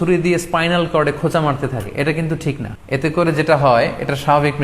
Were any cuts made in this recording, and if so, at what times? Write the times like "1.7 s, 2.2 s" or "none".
2.7 s